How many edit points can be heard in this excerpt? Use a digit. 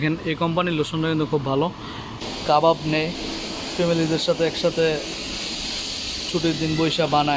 1